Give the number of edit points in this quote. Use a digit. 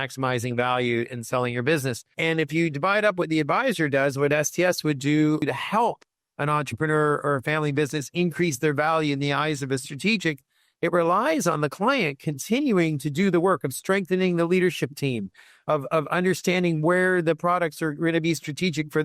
2